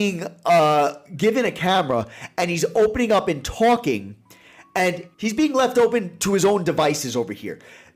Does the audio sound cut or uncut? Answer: uncut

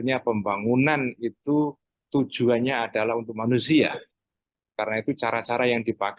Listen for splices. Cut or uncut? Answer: uncut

